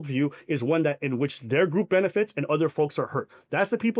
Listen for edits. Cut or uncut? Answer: uncut